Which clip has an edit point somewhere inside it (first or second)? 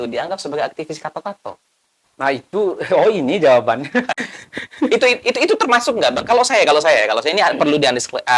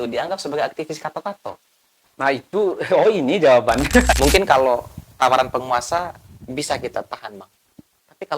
second